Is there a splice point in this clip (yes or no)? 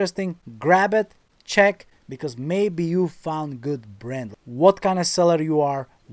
yes